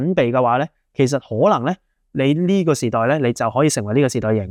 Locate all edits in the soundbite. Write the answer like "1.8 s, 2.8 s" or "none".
none

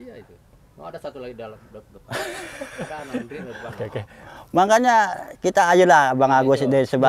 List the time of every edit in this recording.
none

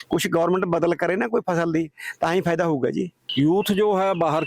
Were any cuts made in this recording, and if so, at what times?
3.2 s

